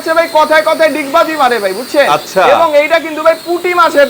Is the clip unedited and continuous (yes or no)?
yes